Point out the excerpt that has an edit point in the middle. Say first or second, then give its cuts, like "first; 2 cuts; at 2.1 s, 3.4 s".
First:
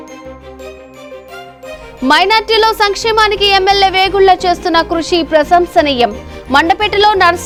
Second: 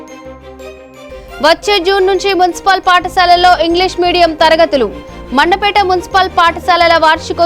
second; 1 cut; at 1.3 s